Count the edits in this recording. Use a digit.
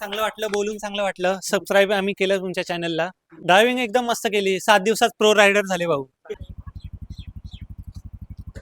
2